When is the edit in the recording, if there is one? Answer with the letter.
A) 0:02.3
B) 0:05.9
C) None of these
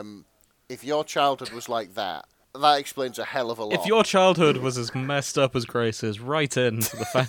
C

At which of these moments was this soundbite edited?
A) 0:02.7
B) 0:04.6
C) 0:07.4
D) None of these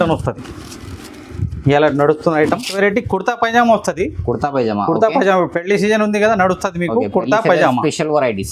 A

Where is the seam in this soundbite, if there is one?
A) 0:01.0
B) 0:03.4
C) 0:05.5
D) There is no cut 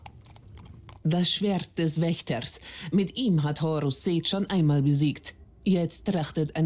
A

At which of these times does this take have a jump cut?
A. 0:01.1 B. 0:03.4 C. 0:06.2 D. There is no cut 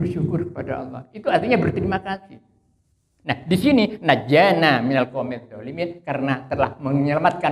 D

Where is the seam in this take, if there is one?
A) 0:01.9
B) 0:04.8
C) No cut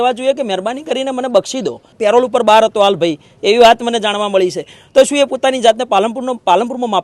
A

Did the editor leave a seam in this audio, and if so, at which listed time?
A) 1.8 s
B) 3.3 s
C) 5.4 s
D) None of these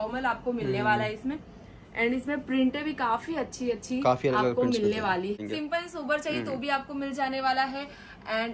C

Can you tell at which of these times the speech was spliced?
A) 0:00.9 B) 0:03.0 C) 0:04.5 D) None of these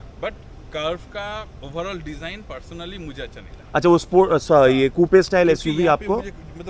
D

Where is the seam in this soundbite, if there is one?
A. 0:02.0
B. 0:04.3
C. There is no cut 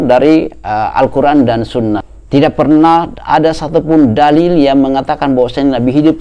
A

